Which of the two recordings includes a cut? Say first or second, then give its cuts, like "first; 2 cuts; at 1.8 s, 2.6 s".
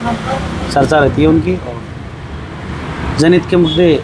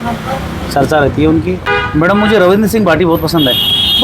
second; 1 cut; at 1.7 s